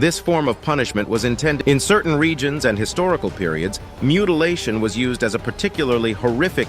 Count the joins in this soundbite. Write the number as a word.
one